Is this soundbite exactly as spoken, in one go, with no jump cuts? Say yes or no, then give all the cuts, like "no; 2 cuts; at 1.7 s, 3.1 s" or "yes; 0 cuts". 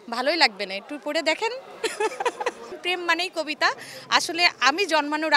no; 1 cut; at 2.8 s